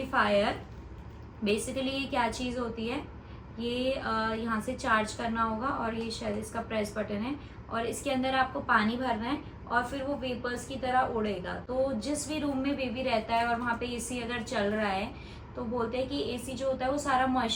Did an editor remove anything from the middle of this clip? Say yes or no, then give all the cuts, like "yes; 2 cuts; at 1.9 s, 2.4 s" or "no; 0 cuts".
no; 0 cuts